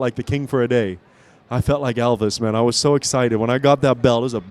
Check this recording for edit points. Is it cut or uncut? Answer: uncut